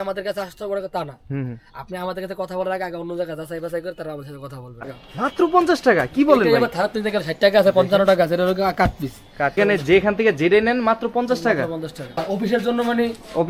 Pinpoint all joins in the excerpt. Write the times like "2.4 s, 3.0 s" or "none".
4.8 s, 9.6 s, 12.2 s